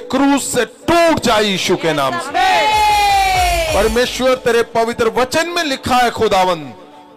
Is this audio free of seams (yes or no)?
yes